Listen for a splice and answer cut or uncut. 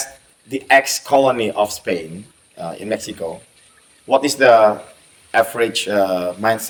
uncut